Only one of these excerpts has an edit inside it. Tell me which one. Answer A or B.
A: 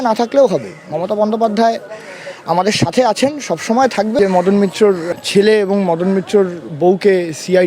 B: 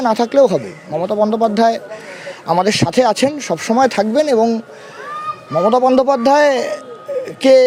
A